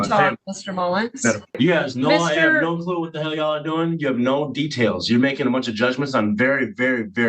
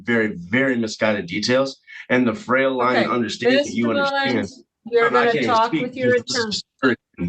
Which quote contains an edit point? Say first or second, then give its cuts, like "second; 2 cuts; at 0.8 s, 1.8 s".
first; 1 cut; at 1.6 s